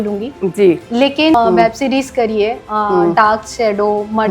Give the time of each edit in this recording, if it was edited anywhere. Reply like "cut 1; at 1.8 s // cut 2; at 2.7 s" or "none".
cut 1; at 1.3 s